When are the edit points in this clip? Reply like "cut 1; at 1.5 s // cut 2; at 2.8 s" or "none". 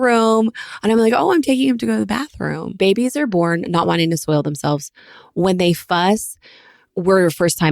cut 1; at 2.8 s